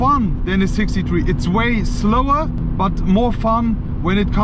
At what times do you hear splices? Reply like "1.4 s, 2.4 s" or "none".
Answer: 2.6 s